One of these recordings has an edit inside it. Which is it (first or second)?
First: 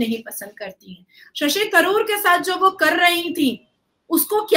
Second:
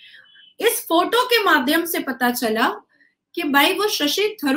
first